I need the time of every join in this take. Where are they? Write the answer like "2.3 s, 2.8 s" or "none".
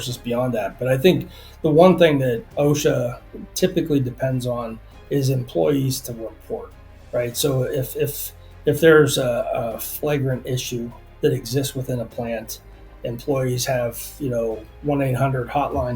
2.4 s, 11.0 s